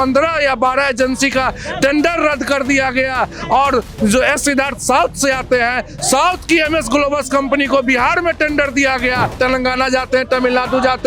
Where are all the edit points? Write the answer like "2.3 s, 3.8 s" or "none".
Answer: 9.3 s